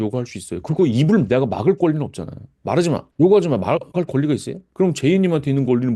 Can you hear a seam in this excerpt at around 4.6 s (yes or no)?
yes